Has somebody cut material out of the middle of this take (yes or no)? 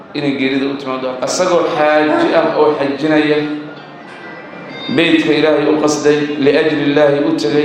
yes